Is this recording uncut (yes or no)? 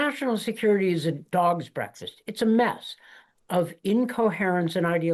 yes